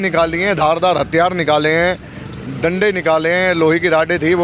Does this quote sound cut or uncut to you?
uncut